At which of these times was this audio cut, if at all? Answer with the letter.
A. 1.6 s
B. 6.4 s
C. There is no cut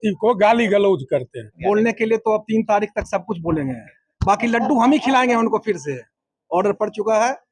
A